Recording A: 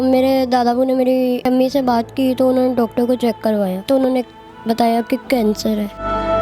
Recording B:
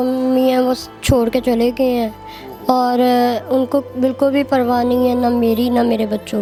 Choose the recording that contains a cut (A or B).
A